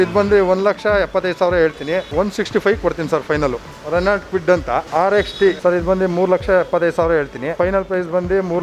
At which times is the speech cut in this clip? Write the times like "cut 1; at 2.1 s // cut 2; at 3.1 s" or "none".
cut 1; at 3.7 s // cut 2; at 4.9 s // cut 3; at 5.6 s // cut 4; at 7.5 s